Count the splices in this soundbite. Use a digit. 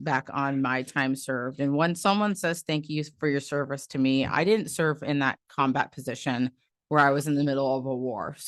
0